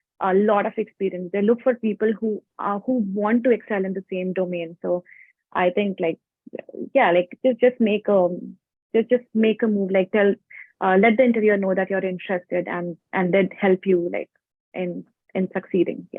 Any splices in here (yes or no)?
no